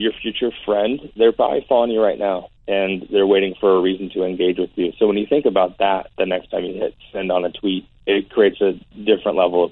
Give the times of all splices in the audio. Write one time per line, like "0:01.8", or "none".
0:02.5
0:07.9